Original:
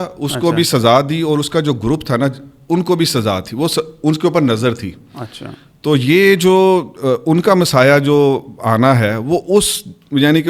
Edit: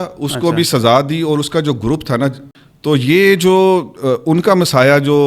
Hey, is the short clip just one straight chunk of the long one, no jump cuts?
no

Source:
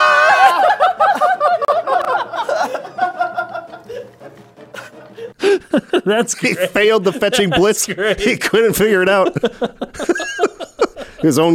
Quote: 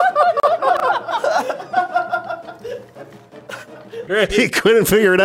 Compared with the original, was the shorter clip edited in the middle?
yes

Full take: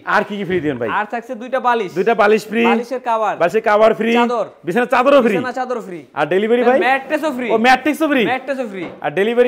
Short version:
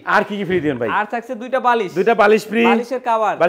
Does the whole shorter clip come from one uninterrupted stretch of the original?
yes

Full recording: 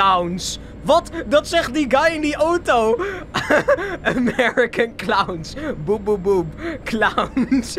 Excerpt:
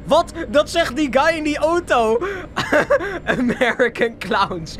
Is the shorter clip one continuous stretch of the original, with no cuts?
yes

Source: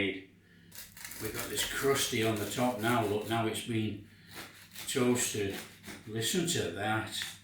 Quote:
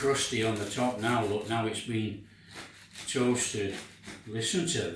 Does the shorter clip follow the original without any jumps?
yes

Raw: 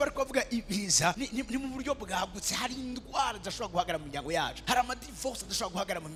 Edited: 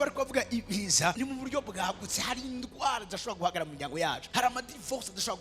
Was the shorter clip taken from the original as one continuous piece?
no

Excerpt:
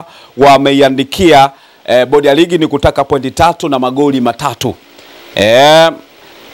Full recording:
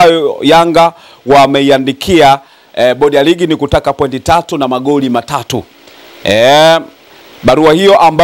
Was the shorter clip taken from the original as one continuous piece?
yes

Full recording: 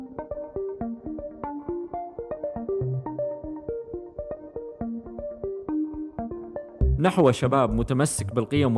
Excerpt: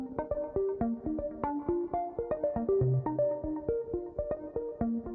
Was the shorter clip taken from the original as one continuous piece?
yes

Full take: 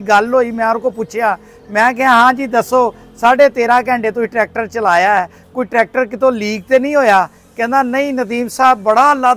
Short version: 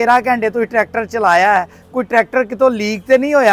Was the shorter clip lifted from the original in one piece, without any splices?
yes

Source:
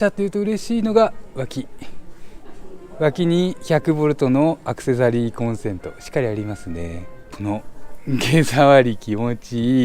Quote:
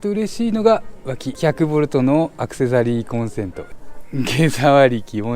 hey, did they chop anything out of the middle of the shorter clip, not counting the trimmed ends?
yes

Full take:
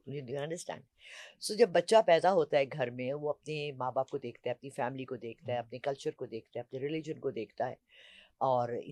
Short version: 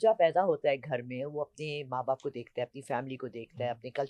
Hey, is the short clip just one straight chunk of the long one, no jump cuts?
yes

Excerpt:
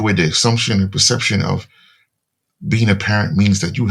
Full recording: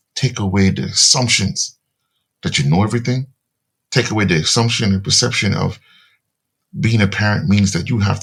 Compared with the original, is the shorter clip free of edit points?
yes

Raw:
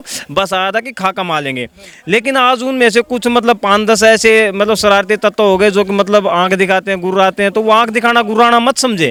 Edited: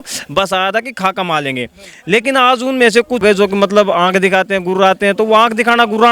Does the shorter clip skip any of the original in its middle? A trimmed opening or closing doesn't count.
yes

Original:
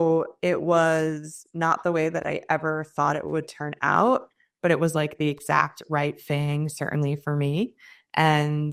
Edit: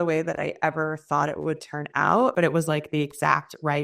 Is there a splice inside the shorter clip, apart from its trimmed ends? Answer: yes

